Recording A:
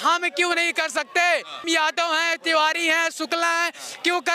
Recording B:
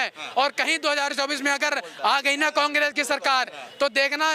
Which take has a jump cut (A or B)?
A